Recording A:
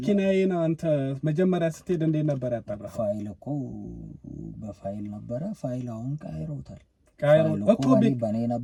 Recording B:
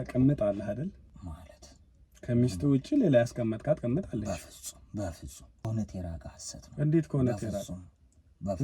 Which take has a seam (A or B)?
B